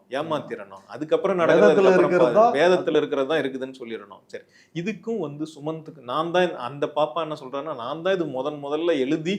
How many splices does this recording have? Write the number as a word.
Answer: zero